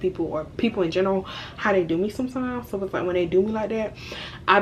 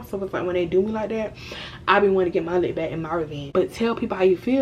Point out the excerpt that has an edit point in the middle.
second; 1 cut; at 3.4 s

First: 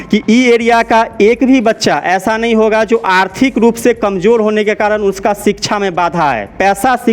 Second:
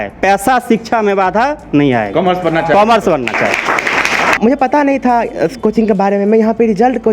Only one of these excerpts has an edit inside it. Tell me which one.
second; 1 cut; at 4.4 s

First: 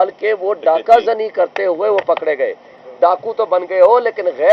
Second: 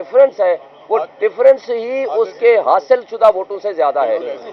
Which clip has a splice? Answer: first; 1 cut; at 2.8 s

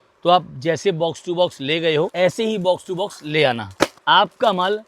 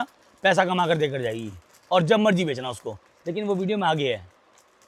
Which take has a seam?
first; 2 cuts; at 2.1 s, 4.0 s

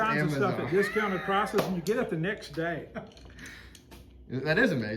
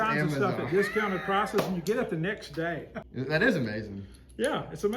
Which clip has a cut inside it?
second; 1 cut; at 3.0 s

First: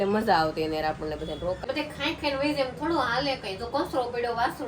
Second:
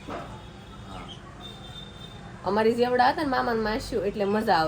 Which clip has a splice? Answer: first; 1 cut; at 1.6 s

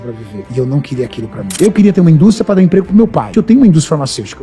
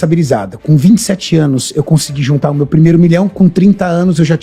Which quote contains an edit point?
first; 2 cuts; at 1.5 s, 3.3 s

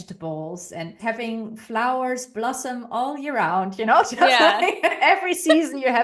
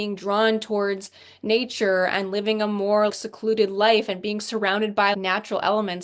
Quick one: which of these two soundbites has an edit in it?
first; 1 cut; at 1.0 s

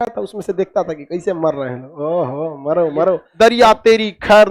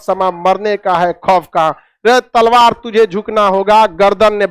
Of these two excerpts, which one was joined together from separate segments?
first; 1 cut; at 3.2 s

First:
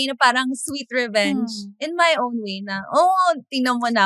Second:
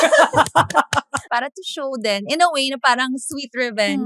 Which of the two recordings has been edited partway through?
second; 1 cut; at 1.2 s

